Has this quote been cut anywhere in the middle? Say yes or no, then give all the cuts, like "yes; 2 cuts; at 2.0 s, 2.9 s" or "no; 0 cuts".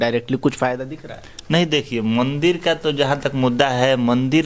no; 0 cuts